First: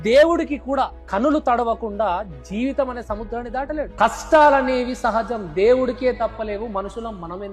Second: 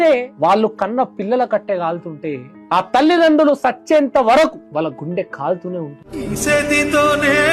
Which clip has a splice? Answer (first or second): second